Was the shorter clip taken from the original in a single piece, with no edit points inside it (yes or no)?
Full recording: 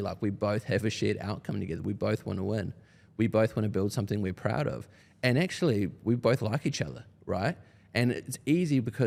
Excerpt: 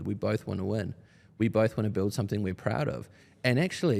yes